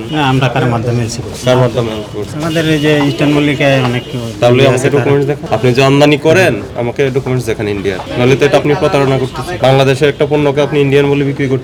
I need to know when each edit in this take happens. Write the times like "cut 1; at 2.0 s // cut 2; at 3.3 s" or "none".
none